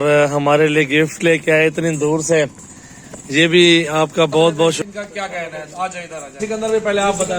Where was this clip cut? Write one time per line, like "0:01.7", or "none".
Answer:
0:04.8
0:06.4